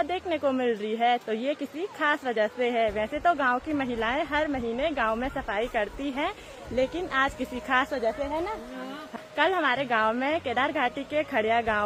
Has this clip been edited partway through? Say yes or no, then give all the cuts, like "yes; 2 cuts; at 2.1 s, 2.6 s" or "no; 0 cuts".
no; 0 cuts